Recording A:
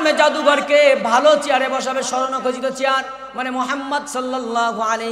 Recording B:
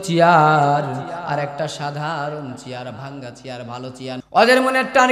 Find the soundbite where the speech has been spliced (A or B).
B